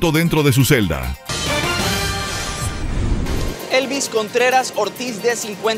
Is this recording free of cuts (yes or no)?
no